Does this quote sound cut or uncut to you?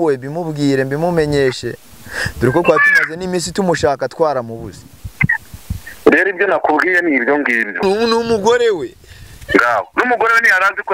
cut